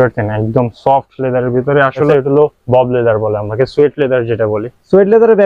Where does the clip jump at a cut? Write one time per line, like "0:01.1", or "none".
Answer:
0:02.1